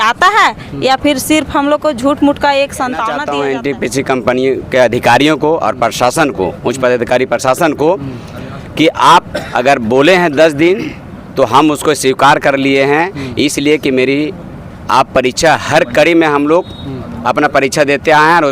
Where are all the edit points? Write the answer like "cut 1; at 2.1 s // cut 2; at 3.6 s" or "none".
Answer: cut 1; at 3.1 s